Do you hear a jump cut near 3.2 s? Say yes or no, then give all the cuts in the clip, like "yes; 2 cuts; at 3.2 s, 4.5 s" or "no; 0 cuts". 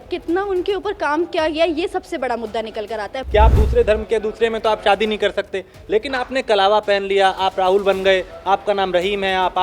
yes; 1 cut; at 3.2 s